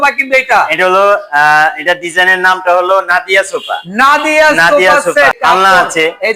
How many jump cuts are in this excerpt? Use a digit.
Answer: 1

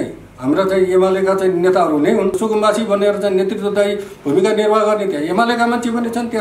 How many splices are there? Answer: 1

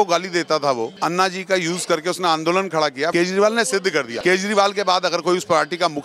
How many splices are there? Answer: 3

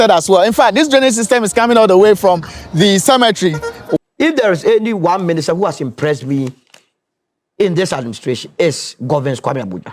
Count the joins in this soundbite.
1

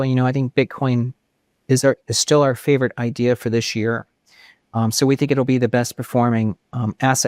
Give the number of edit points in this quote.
0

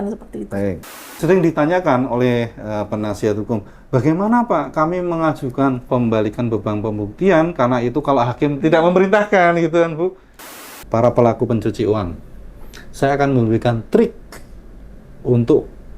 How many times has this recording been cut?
4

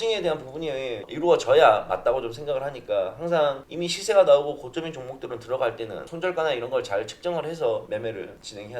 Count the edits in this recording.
3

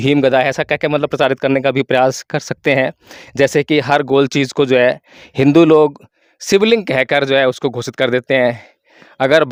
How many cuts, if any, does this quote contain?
0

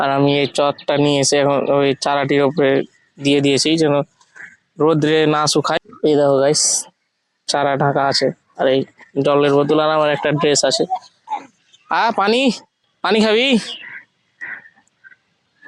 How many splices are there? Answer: 0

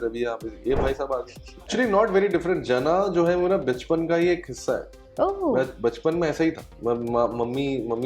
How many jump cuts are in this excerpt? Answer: 1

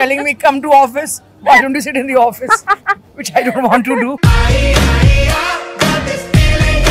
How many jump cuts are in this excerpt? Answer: 0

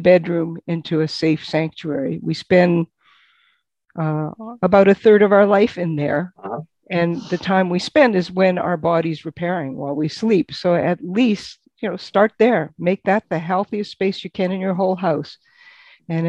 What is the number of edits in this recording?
0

